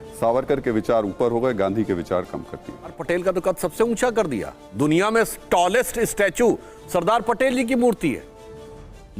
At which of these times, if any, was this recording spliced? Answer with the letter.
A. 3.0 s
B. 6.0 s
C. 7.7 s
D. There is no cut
A